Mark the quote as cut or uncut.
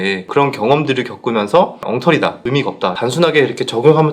cut